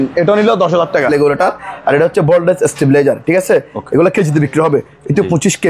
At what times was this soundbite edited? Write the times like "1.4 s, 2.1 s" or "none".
1.1 s